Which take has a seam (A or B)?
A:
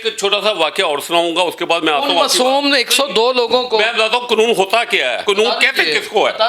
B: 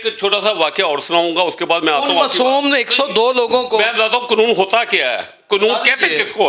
A